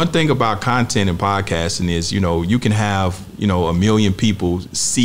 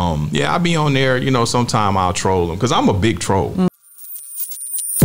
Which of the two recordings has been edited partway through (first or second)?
second